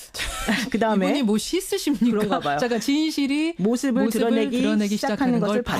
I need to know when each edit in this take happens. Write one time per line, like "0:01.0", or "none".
0:04.4